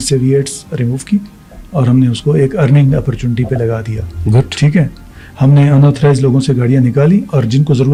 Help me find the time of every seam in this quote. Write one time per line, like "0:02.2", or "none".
none